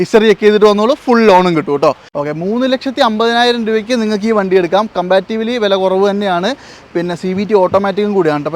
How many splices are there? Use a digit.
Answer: 1